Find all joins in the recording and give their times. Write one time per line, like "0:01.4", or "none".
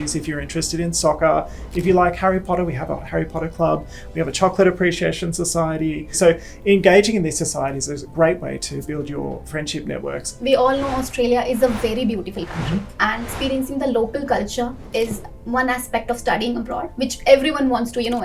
0:06.1
0:08.0
0:08.9
0:10.3
0:13.3
0:15.0
0:16.9